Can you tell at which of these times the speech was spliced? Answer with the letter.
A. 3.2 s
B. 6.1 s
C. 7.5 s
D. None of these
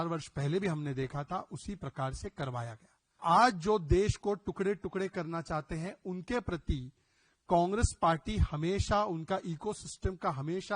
A